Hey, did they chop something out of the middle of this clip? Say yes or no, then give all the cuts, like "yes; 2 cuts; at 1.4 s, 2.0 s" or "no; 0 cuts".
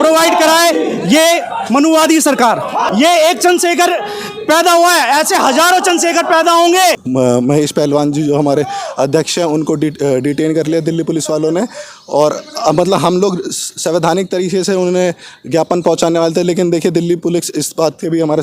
yes; 2 cuts; at 2.9 s, 7.0 s